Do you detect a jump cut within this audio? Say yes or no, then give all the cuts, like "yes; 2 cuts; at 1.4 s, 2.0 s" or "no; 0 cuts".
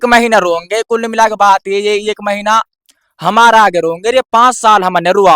no; 0 cuts